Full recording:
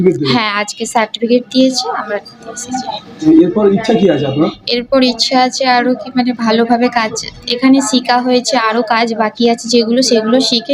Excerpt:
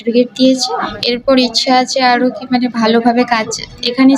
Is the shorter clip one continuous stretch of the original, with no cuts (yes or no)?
no